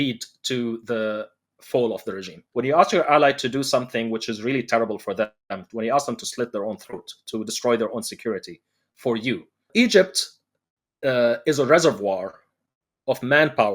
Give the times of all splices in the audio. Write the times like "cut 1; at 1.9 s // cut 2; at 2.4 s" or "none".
cut 1; at 2.3 s // cut 2; at 9.7 s